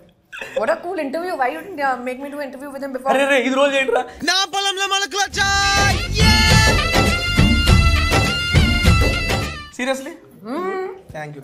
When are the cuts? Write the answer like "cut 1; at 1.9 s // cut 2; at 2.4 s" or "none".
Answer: none